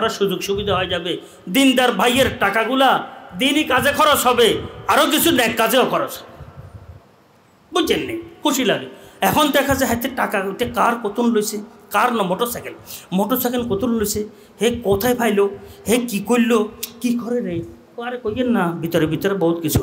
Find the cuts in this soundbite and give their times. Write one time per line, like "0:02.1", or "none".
none

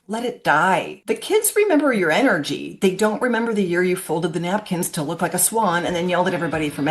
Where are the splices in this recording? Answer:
0:00.9

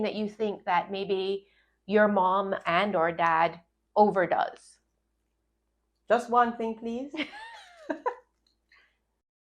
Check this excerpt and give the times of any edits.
none

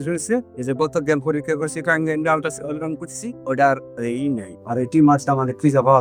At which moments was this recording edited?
none

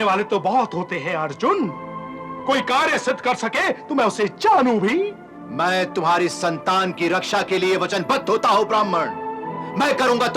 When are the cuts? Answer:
none

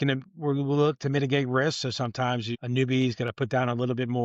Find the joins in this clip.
0:02.6

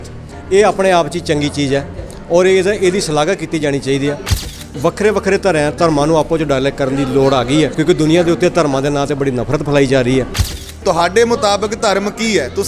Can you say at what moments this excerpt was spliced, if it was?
0:04.4
0:07.8
0:10.6

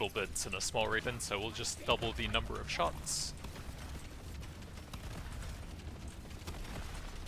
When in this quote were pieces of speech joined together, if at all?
0:01.0

